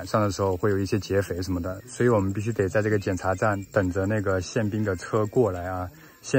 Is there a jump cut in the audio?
no; 0 cuts

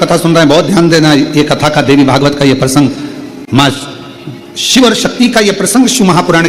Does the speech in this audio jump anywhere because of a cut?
no; 0 cuts

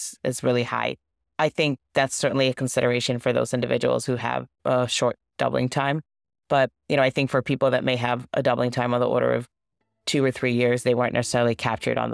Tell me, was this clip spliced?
no; 0 cuts

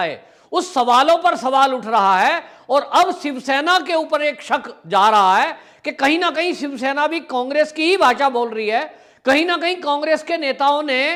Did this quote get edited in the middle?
no; 0 cuts

